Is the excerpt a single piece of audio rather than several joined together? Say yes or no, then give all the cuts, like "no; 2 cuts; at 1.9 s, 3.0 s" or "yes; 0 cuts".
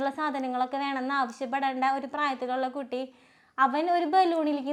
yes; 0 cuts